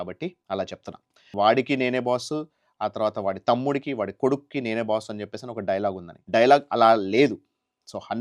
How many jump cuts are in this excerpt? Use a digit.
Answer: 2